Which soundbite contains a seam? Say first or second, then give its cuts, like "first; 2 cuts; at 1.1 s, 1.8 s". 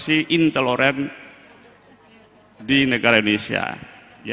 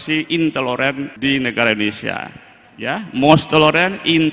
second; 1 cut; at 1.1 s